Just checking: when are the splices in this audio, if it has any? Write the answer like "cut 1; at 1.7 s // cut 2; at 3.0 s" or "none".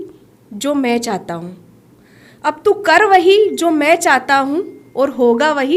none